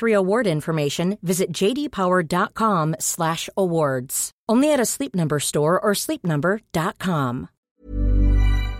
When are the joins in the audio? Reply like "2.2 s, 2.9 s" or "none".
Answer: 7.7 s